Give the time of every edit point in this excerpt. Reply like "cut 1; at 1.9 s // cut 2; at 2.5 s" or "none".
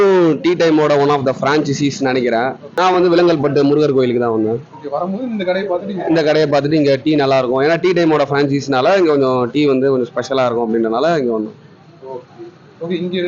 cut 1; at 2.6 s